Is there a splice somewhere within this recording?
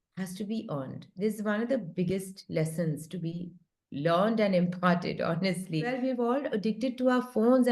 yes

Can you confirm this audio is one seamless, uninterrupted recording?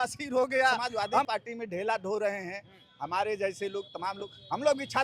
no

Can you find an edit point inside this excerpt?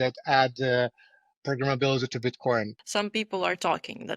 yes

